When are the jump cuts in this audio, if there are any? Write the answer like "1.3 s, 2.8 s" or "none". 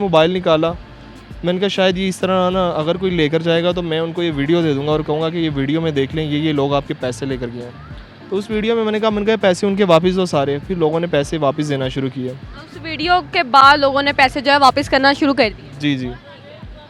none